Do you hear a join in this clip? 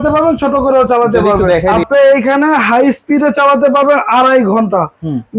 yes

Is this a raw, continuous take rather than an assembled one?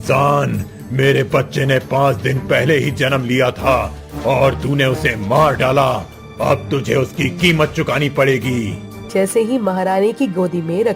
no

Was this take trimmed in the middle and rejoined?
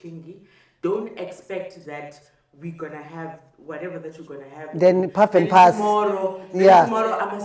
no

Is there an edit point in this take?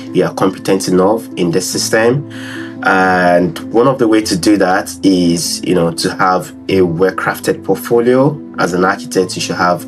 no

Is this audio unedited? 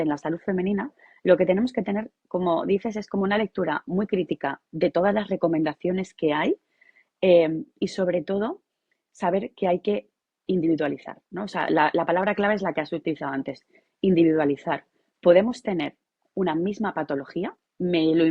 yes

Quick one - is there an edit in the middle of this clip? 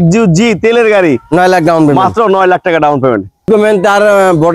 yes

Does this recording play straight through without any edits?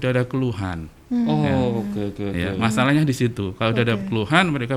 yes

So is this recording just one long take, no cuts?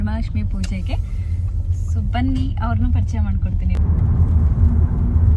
yes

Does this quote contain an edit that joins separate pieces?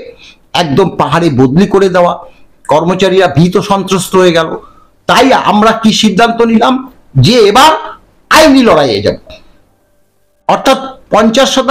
no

